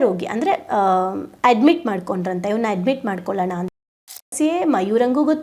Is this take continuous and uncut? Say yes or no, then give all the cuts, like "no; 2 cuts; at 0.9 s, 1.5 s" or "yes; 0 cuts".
no; 1 cut; at 4.3 s